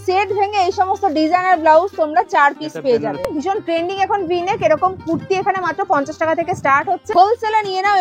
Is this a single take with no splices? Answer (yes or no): no